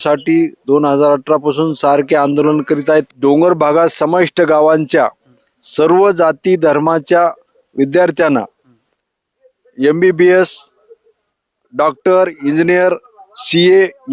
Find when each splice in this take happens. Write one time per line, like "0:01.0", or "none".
0:03.1